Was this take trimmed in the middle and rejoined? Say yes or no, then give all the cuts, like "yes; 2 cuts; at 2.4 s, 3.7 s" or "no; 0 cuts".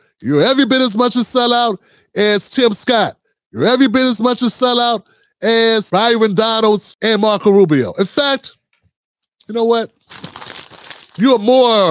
yes; 2 cuts; at 5.9 s, 6.9 s